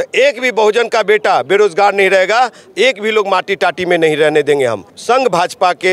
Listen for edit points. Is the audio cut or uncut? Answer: cut